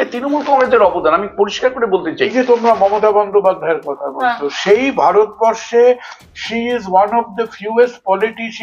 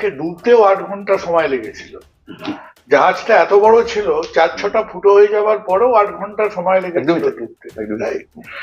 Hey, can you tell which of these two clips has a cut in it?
first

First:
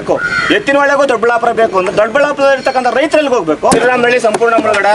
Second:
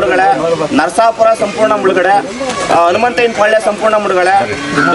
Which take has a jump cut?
first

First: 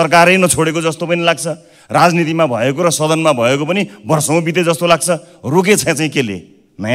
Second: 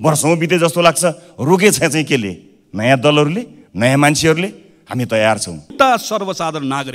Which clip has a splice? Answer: second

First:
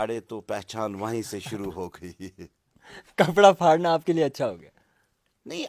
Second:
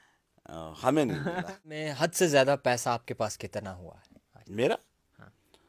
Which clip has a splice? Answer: second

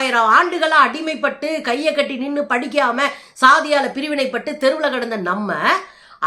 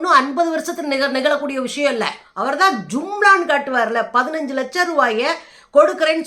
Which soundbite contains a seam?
second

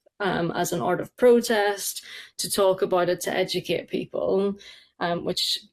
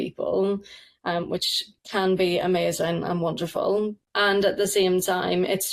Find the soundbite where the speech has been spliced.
second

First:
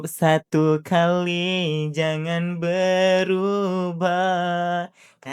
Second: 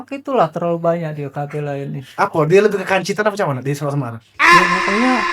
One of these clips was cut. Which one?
second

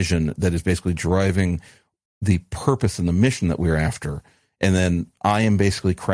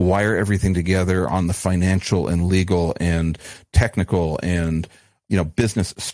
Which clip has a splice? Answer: second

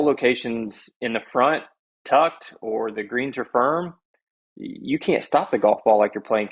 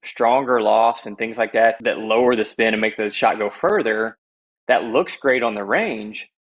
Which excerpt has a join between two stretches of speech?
second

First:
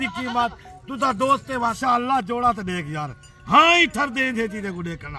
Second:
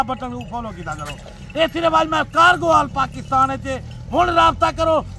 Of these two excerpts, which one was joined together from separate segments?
first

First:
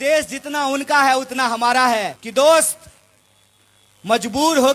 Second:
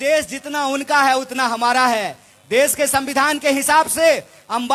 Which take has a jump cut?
first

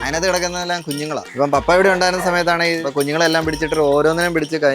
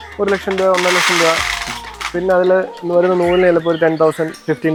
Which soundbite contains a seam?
first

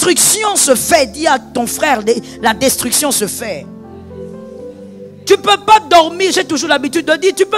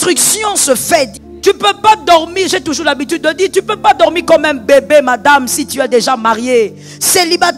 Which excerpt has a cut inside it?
second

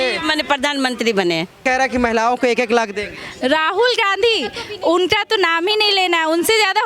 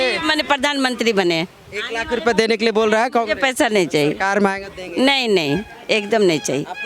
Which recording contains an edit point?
first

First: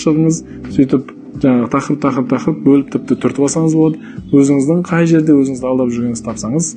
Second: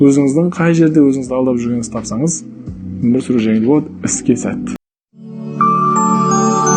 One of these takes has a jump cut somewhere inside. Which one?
second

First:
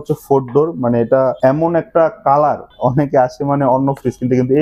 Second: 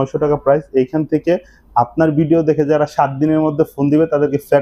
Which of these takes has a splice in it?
first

